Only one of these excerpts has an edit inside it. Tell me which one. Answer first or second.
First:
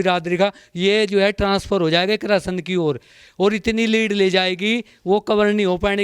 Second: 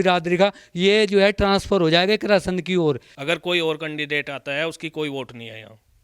second